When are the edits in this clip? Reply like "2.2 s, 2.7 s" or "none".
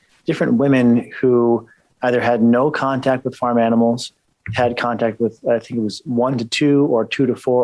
6.0 s